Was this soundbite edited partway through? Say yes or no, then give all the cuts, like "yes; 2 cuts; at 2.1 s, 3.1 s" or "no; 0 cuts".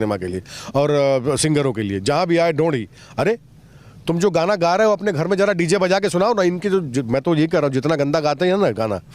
no; 0 cuts